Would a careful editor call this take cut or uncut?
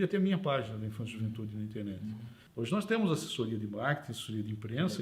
cut